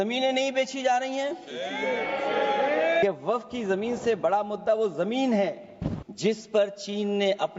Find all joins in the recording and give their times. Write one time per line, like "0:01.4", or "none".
0:03.0
0:06.0

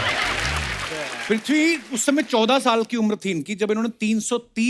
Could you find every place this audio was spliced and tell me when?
0:01.2

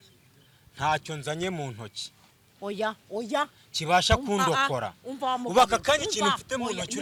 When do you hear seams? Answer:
none

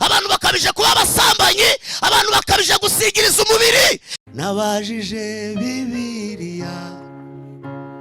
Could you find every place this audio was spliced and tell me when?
0:04.1

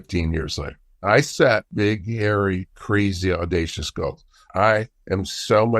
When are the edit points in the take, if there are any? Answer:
0:01.0

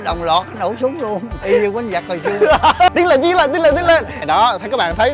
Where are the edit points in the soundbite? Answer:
0:01.3
0:02.9
0:04.1

